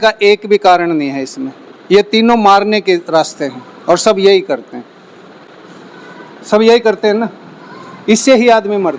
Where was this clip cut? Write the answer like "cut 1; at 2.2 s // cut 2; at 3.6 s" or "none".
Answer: none

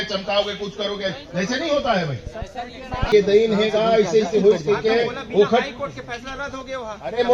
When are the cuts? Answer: cut 1; at 3.1 s

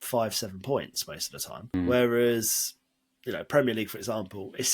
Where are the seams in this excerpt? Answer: cut 1; at 1.7 s

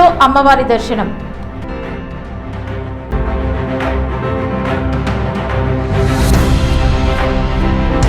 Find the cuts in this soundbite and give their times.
cut 1; at 3.0 s

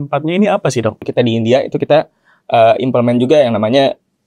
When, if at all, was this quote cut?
cut 1; at 1.1 s

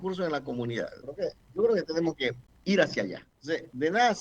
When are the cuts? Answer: cut 1; at 1.0 s // cut 2; at 2.5 s // cut 3; at 3.3 s

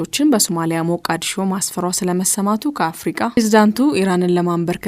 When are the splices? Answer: cut 1; at 3.4 s

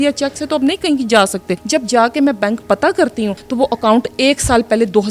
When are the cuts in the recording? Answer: cut 1; at 1.6 s // cut 2; at 3.4 s

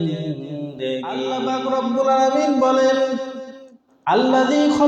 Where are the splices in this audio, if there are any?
cut 1; at 1.4 s

